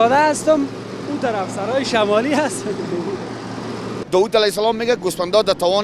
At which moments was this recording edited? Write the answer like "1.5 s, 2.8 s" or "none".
3.9 s